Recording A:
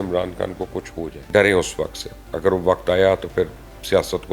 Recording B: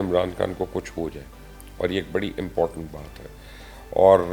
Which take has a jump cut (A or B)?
A